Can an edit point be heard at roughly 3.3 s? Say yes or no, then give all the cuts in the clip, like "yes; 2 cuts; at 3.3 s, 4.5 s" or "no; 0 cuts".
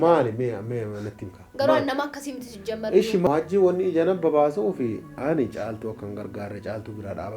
yes; 1 cut; at 3.3 s